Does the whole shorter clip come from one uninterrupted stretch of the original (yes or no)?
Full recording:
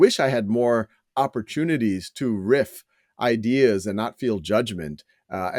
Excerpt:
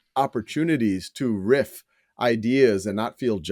yes